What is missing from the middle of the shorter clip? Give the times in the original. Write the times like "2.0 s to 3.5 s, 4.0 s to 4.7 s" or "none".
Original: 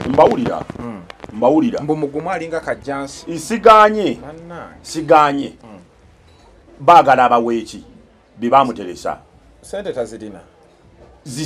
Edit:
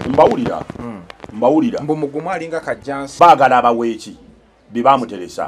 3.1 s to 6.7 s